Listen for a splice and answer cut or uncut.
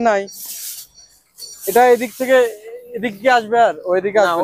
uncut